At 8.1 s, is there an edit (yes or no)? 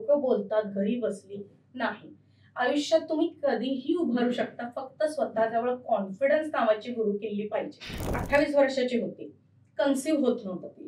yes